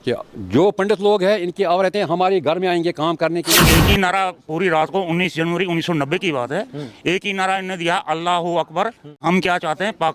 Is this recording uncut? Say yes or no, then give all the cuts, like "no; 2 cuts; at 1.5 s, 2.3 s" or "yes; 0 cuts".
no; 2 cuts; at 3.6 s, 9.2 s